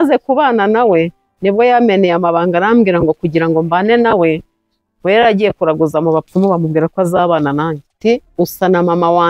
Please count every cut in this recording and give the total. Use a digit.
1